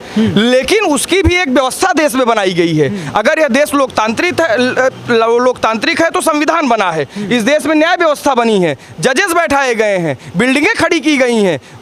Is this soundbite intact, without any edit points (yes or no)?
yes